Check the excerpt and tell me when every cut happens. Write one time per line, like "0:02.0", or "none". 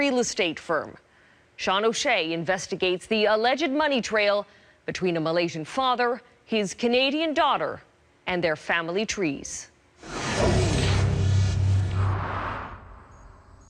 none